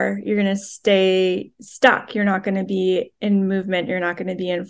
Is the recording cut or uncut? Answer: uncut